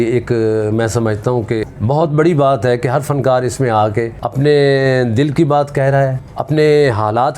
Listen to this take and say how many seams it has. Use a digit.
3